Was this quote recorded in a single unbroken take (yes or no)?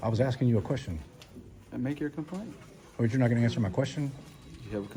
yes